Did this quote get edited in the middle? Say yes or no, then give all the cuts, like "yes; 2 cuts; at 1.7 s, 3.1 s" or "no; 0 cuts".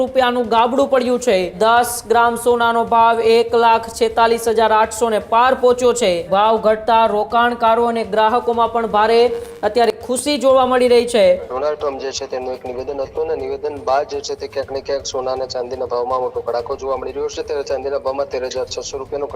yes; 3 cuts; at 1.5 s, 6.3 s, 11.5 s